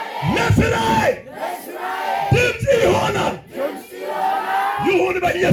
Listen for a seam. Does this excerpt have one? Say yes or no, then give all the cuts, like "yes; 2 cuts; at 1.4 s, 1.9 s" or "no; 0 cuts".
no; 0 cuts